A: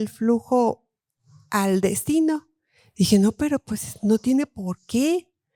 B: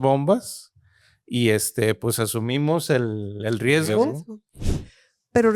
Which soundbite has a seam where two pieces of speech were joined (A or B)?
B